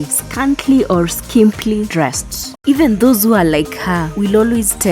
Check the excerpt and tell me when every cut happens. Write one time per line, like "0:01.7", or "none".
0:02.4